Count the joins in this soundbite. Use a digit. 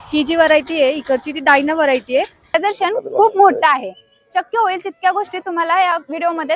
1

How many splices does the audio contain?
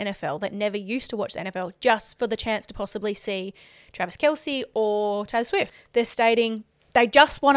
1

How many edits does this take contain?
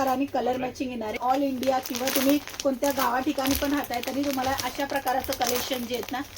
1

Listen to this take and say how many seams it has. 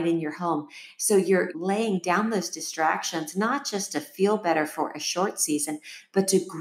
1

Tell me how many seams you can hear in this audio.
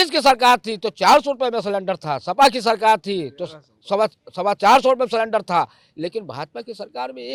0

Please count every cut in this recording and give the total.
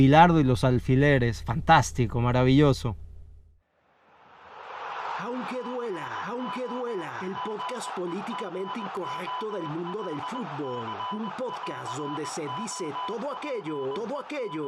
1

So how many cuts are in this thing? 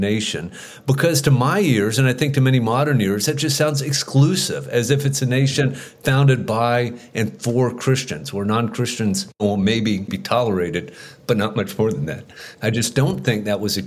2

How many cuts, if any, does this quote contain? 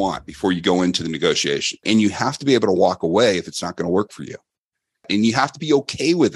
2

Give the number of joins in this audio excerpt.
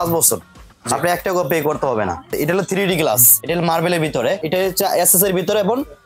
3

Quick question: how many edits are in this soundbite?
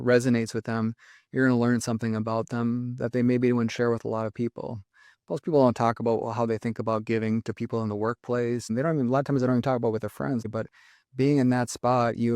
2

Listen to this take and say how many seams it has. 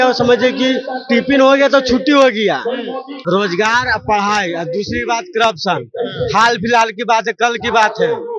1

